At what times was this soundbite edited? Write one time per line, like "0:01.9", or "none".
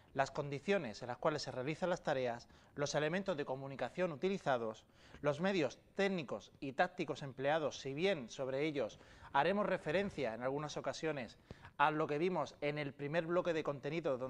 none